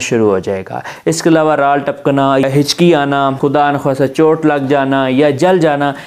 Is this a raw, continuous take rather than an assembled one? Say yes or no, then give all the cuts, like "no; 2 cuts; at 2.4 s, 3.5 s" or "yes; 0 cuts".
no; 2 cuts; at 2.5 s, 3.4 s